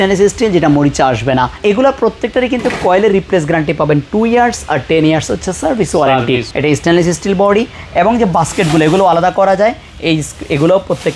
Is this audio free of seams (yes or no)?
no